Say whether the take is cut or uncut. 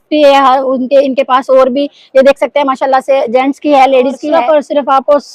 cut